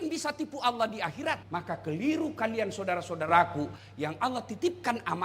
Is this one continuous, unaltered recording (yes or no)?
no